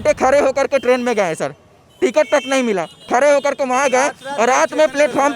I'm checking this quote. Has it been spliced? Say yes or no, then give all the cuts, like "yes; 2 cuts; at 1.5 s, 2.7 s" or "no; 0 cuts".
no; 0 cuts